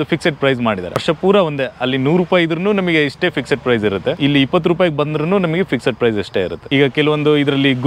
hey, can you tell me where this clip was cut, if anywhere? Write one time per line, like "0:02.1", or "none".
0:00.9
0:04.2
0:06.6